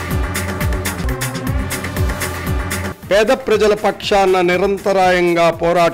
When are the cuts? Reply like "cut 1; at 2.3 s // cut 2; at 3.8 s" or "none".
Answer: cut 1; at 1.0 s